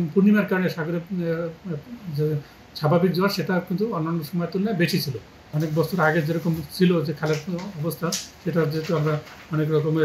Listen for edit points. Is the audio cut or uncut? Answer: cut